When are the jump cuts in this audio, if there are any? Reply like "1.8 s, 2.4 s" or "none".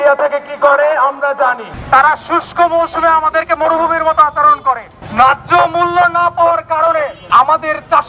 1.7 s, 7.2 s